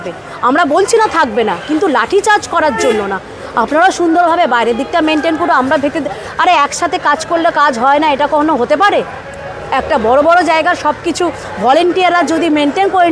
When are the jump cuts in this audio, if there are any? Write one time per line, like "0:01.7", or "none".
none